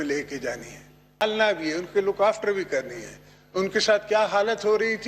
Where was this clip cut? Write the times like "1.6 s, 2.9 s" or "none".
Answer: 1.2 s